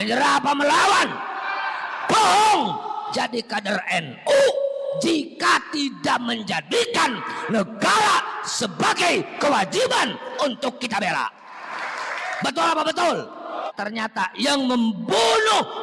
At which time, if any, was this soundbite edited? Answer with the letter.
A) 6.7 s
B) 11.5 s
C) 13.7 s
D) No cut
C